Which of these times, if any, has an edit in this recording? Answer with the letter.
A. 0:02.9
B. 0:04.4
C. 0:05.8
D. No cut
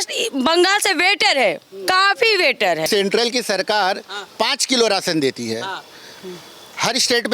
A